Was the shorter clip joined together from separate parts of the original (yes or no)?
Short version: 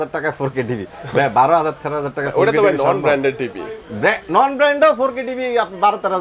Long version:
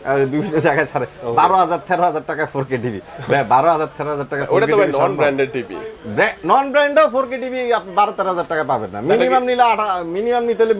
no